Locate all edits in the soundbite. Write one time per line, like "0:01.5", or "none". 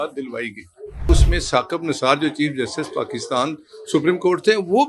0:01.0